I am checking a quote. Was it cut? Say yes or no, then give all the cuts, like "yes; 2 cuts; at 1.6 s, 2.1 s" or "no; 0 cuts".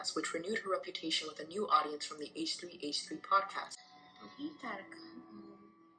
yes; 1 cut; at 3.8 s